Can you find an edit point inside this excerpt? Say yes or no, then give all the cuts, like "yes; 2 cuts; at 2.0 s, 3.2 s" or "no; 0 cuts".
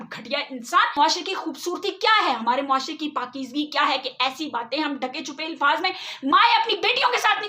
yes; 1 cut; at 0.9 s